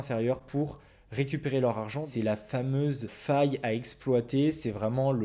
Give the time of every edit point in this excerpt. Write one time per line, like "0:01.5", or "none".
0:02.0